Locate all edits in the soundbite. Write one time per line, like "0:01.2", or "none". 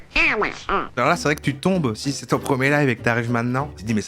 0:01.0

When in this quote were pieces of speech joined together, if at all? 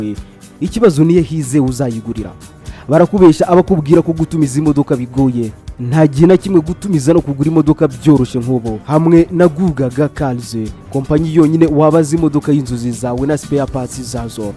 none

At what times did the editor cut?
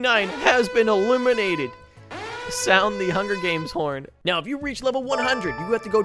0:04.1

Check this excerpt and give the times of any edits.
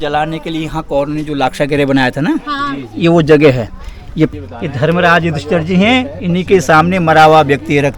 0:04.3

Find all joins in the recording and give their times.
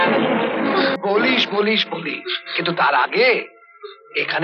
0:01.0

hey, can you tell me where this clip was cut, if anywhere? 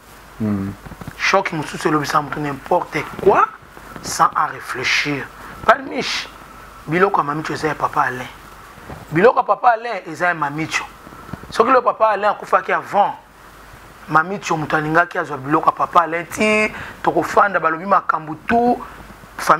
none

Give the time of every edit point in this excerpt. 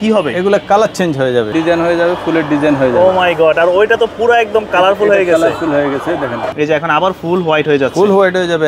0:01.5
0:06.5

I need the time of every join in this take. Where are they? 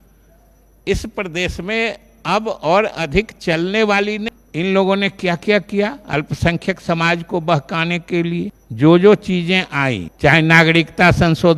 0:04.3
0:08.6
0:10.1

